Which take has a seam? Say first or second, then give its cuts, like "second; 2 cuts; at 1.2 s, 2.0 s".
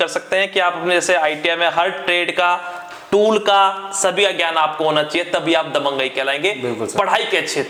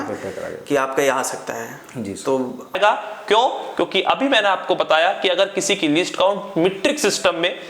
second; 1 cut; at 2.7 s